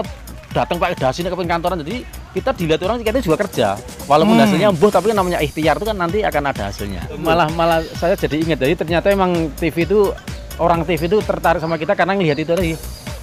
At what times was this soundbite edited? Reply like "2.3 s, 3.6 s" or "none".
7.2 s